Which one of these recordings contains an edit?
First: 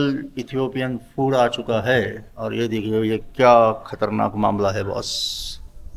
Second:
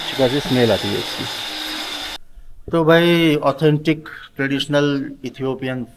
second; 1 cut; at 2.3 s

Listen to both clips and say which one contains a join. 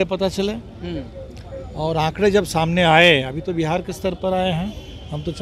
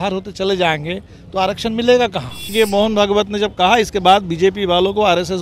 second; 1 cut; at 2.5 s

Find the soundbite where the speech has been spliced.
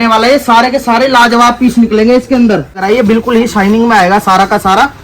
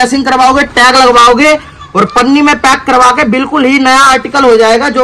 first; 1 cut; at 2.8 s

